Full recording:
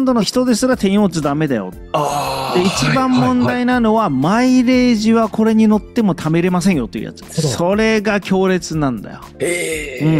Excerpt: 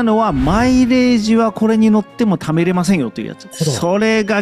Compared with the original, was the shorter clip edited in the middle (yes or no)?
no